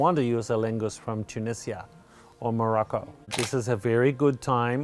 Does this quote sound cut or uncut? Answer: cut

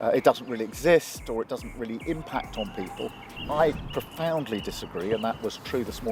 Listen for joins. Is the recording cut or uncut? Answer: uncut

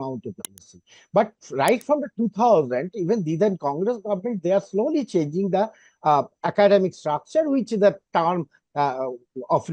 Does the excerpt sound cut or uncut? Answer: uncut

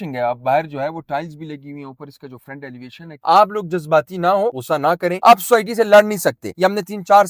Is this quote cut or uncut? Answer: cut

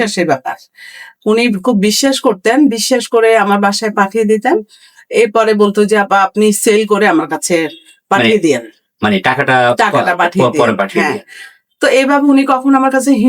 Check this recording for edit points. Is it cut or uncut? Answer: uncut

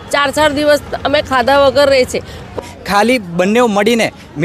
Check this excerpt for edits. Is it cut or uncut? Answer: cut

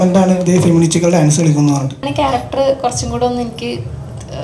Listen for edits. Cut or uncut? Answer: cut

